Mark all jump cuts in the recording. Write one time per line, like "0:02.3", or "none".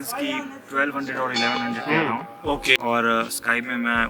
0:02.8